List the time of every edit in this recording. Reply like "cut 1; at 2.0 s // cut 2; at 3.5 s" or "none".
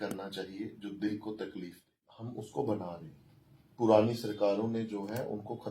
cut 1; at 2.2 s